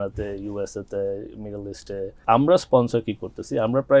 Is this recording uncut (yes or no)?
no